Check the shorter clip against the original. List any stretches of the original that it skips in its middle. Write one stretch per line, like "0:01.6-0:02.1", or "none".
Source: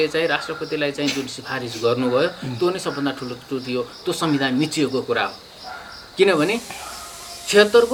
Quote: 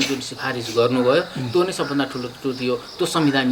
none

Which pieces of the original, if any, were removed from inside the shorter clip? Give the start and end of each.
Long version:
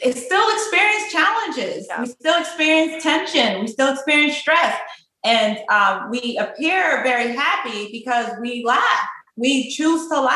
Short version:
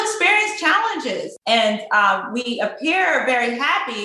0:01.8-0:05.1

